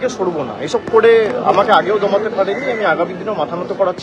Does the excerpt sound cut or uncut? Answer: uncut